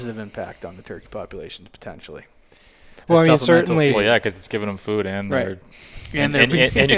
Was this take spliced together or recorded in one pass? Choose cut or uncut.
uncut